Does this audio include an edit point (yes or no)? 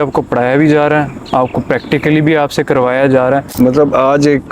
yes